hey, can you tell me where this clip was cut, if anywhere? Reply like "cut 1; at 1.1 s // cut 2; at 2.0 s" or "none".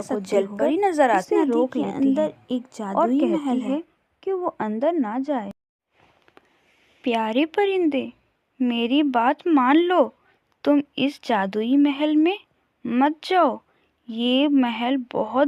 none